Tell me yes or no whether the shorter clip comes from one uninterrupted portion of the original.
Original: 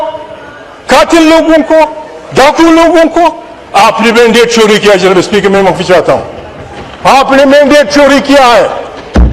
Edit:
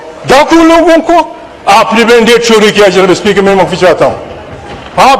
yes